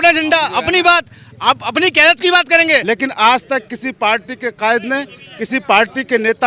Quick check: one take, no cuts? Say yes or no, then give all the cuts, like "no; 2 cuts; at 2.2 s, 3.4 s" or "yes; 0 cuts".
no; 1 cut; at 2.8 s